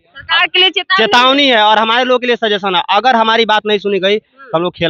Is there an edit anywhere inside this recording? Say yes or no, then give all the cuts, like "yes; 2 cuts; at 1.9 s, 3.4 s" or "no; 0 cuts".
no; 0 cuts